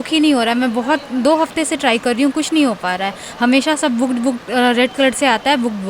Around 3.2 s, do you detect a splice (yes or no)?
no